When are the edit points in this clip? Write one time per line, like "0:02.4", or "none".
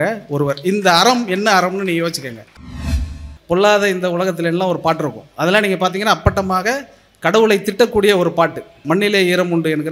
0:02.9
0:08.7